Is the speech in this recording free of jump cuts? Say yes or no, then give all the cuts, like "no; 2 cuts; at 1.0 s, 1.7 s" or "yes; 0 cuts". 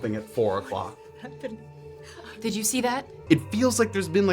no; 1 cut; at 3.2 s